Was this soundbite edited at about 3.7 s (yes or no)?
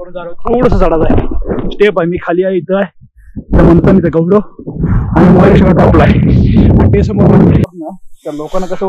no